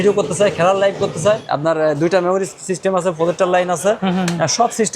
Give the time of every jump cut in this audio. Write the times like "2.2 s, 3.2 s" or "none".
1.5 s